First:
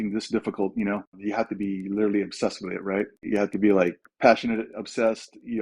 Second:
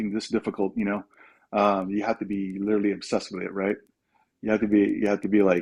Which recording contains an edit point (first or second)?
first